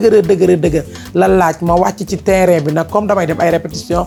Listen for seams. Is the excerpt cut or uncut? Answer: uncut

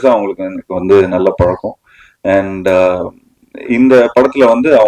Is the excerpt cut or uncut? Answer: uncut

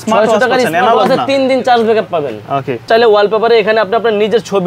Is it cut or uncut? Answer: cut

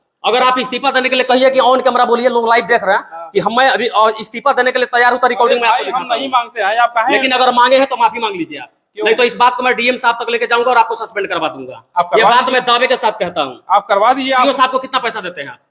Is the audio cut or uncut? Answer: uncut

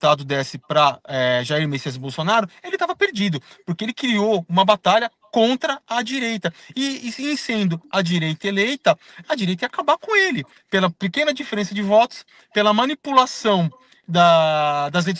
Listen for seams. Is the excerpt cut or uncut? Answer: cut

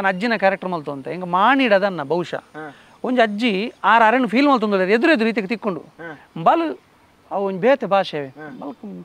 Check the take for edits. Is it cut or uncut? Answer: uncut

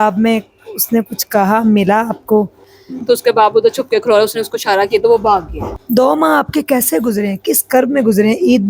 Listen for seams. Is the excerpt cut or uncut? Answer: cut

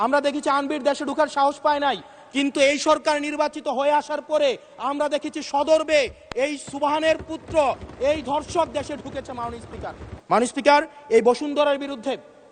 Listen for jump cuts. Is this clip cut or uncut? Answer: cut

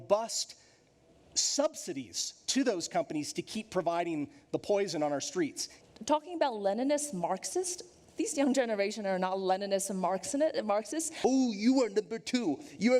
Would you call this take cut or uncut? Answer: cut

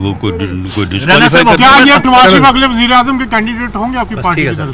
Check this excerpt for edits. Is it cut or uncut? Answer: cut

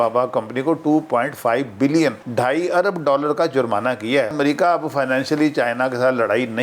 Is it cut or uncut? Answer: cut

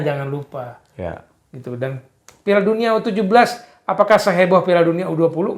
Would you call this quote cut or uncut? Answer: uncut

